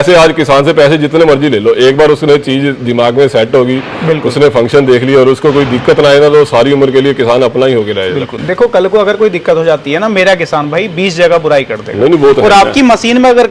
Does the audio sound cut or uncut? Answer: uncut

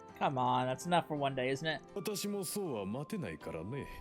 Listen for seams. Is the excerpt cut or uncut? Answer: cut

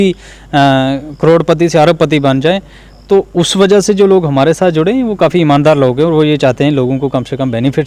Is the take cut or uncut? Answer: uncut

